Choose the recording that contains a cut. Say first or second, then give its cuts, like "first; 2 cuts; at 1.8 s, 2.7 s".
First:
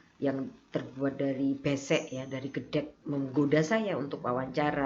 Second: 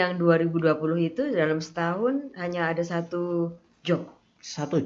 first; 1 cut; at 3.0 s